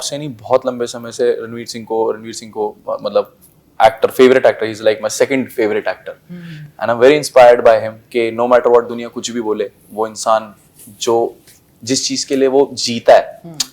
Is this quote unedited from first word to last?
yes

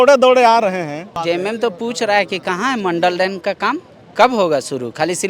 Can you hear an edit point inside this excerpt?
yes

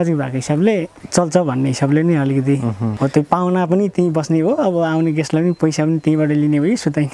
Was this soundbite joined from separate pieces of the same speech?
yes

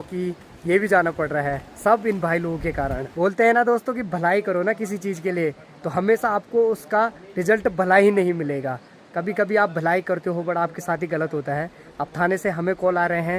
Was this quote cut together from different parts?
no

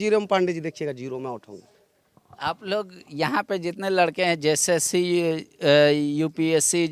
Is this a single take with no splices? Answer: yes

